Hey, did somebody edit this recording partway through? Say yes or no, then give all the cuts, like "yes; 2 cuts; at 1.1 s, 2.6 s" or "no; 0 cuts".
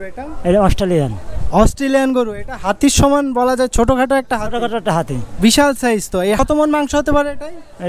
no; 0 cuts